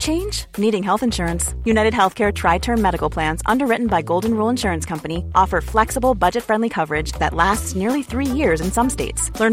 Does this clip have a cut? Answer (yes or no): no